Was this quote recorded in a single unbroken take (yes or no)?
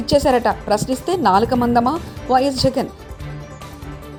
yes